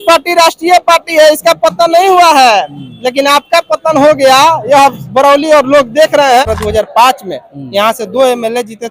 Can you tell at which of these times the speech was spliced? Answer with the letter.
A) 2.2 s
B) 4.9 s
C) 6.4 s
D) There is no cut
C